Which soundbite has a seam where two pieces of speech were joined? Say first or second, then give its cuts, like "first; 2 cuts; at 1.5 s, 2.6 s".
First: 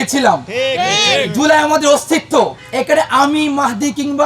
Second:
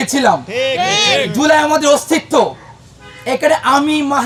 first; 1 cut; at 2.6 s